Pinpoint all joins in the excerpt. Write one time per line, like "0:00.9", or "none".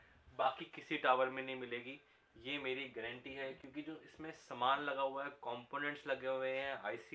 none